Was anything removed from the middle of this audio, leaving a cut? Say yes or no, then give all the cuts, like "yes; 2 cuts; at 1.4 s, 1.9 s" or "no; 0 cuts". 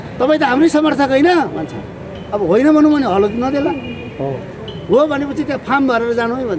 no; 0 cuts